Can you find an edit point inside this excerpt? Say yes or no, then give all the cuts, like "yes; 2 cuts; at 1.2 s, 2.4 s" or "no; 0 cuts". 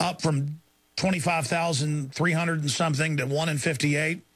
no; 0 cuts